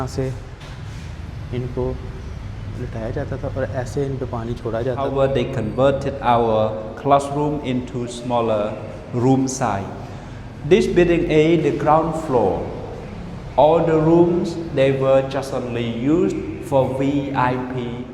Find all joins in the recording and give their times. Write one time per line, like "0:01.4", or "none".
0:05.0